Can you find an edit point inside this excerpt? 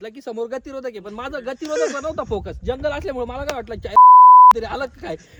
no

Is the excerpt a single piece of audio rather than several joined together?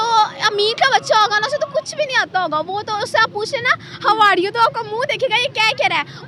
yes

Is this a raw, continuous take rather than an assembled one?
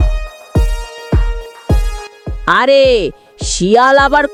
yes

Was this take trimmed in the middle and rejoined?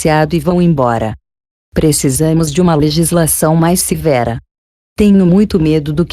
yes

